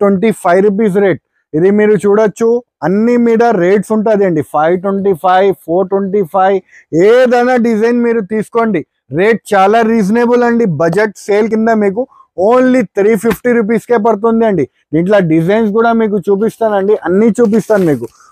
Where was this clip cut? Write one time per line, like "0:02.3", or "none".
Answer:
none